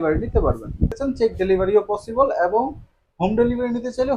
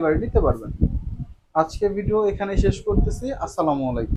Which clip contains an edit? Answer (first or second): first